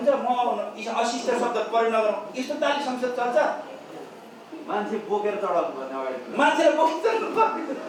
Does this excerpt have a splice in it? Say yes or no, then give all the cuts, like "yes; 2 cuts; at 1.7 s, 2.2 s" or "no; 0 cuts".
no; 0 cuts